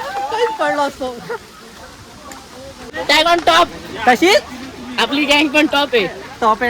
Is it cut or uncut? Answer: cut